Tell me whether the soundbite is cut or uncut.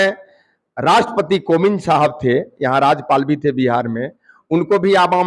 uncut